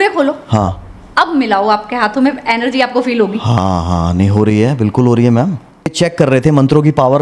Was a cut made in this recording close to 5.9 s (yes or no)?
yes